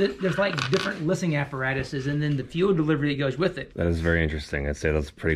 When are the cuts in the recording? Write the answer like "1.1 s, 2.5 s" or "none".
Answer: 3.6 s